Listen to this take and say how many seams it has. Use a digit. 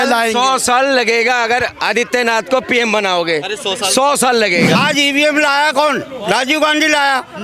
1